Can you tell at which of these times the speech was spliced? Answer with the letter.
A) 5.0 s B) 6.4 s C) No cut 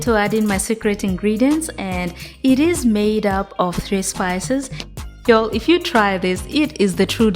A